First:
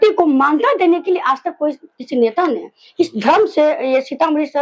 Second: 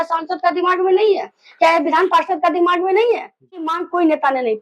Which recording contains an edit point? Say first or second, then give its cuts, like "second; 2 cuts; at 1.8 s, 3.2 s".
second; 1 cut; at 3.7 s